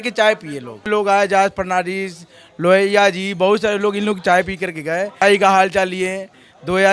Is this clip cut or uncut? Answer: cut